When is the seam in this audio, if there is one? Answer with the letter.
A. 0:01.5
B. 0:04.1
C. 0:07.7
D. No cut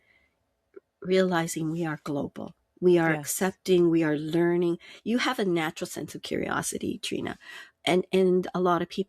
D